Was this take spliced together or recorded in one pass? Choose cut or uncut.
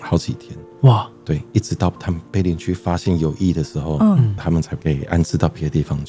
uncut